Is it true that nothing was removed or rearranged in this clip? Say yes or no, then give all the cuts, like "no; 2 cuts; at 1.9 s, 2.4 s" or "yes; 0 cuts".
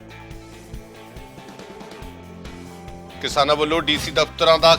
no; 1 cut; at 2.4 s